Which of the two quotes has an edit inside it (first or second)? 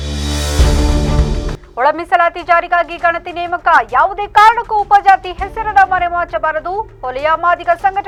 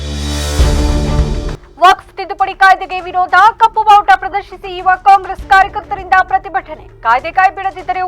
second